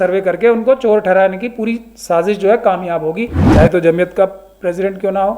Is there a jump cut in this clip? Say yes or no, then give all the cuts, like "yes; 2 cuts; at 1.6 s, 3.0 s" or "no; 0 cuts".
yes; 1 cut; at 3.3 s